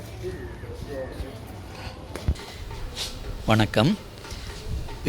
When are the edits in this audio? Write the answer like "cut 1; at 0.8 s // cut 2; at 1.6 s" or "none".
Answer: none